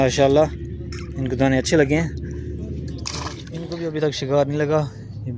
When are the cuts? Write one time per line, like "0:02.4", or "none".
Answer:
0:03.7